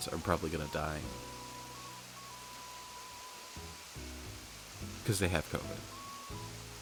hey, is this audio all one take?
yes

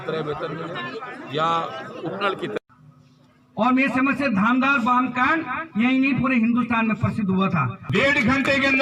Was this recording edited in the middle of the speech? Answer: yes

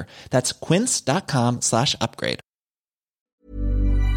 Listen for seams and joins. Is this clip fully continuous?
no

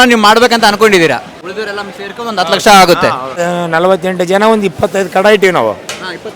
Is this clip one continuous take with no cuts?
no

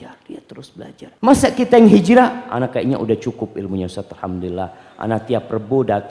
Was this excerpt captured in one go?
no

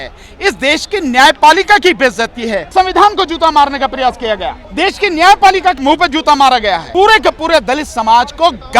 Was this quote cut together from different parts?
yes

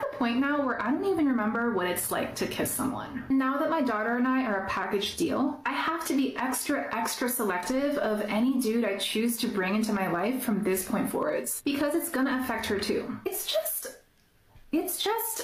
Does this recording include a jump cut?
yes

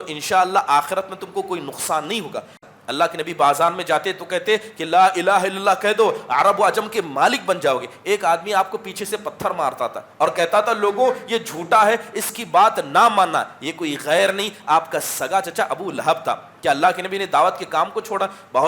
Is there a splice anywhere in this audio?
yes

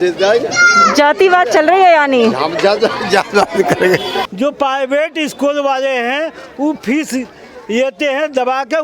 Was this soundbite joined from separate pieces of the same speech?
yes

